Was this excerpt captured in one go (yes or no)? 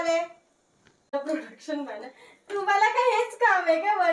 no